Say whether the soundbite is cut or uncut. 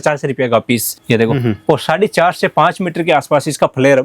cut